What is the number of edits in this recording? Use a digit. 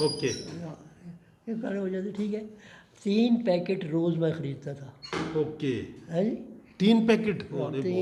0